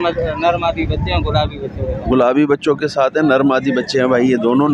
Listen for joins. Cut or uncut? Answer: uncut